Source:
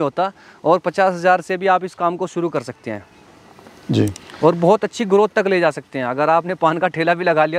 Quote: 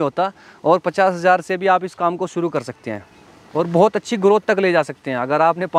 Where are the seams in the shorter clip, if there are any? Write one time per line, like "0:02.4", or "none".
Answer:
0:03.4